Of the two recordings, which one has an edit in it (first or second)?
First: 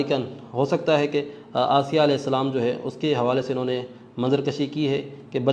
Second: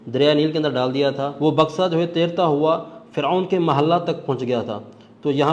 second